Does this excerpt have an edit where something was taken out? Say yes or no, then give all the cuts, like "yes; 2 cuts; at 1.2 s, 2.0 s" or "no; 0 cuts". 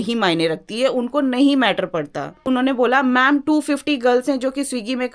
yes; 1 cut; at 2.4 s